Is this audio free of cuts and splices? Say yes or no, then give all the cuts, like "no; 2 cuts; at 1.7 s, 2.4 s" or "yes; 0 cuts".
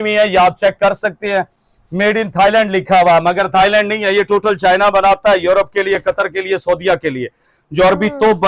yes; 0 cuts